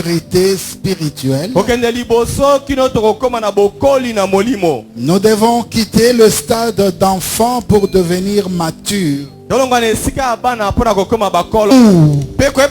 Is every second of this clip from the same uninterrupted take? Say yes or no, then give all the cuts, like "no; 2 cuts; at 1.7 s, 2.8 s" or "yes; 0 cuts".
no; 1 cut; at 11.7 s